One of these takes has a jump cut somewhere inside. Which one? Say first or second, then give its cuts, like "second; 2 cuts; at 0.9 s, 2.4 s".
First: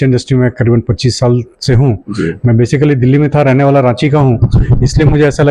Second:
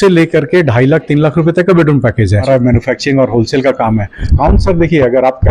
second; 2 cuts; at 2.4 s, 4.3 s